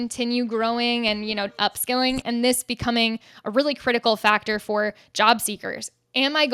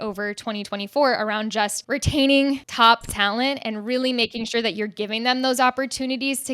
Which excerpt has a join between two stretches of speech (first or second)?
second